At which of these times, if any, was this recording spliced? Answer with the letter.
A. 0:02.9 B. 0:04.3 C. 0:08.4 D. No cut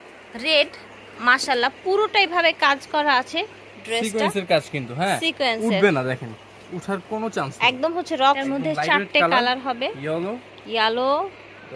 C